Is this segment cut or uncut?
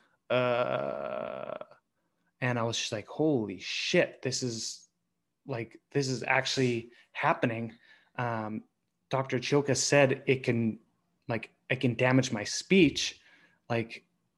uncut